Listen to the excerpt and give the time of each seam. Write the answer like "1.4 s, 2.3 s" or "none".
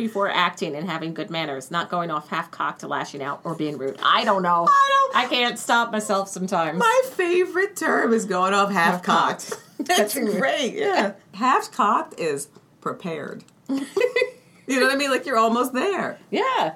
11.3 s